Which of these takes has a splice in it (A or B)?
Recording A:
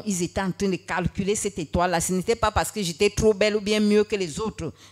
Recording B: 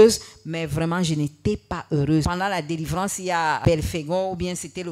B